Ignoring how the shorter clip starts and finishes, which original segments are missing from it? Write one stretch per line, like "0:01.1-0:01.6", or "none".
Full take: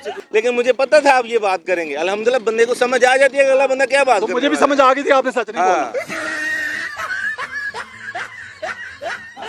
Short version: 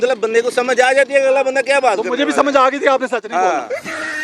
none